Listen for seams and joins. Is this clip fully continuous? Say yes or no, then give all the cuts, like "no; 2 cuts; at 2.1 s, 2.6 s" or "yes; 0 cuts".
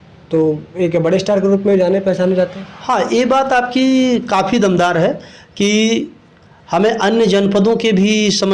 yes; 0 cuts